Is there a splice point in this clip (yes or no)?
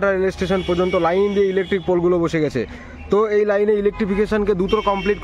no